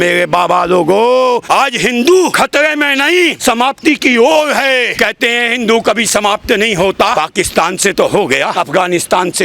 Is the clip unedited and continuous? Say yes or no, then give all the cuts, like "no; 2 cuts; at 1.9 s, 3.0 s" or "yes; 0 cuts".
no; 6 cuts; at 1.4 s, 2.3 s, 3.4 s, 4.9 s, 7.1 s, 8.5 s